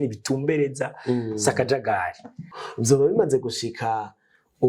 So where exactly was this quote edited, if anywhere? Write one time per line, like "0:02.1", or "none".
0:02.5